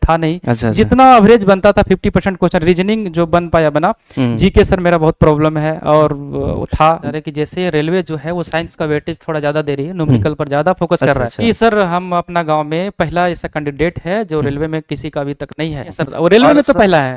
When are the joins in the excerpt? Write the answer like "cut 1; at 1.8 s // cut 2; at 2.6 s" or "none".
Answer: cut 1; at 7.1 s // cut 2; at 11.4 s // cut 3; at 16.0 s